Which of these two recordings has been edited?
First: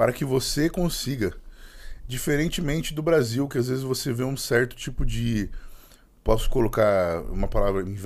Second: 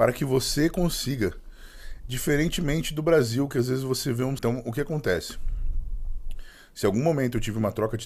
second; 1 cut; at 4.4 s

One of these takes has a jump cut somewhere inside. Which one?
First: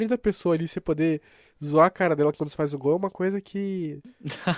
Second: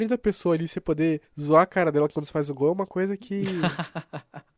second; 2 cuts; at 1.3 s, 3.6 s

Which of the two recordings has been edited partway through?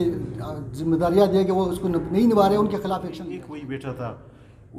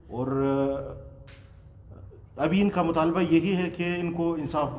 first; 1 cut; at 3.3 s

